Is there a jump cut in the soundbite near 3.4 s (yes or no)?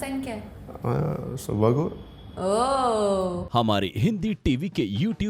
yes